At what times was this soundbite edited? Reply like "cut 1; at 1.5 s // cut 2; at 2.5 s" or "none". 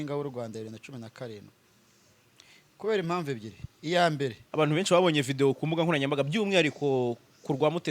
cut 1; at 4.4 s